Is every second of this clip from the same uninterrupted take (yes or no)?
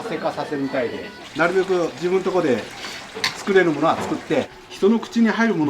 no